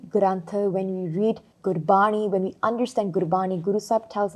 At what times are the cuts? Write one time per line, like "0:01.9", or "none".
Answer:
0:01.5